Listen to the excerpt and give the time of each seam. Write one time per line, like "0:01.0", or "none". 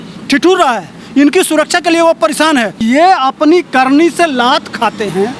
0:02.8